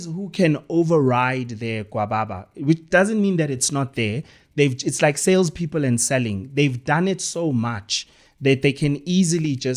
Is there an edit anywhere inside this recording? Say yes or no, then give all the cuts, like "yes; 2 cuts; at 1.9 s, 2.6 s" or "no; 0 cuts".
no; 0 cuts